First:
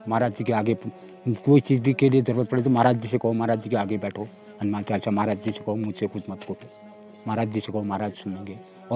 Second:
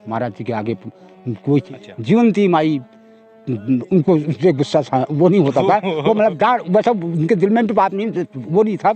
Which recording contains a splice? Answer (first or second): second